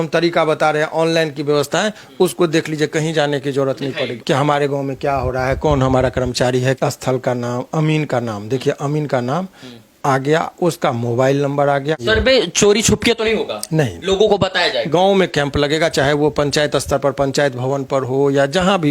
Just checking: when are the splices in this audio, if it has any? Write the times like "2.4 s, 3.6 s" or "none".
4.2 s, 6.8 s, 12.0 s, 14.9 s